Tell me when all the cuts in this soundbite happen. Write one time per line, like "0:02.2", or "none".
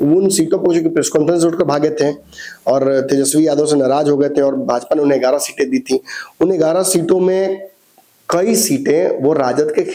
none